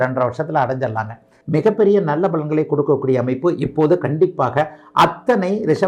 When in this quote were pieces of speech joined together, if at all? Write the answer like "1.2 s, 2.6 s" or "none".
1.3 s